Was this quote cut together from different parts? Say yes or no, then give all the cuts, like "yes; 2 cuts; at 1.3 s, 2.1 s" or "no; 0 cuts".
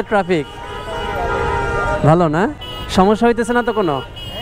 no; 0 cuts